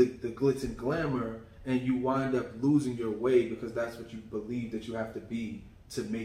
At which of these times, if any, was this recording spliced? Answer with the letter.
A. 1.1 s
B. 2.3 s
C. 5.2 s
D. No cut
D